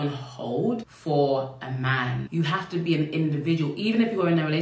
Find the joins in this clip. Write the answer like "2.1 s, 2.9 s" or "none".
none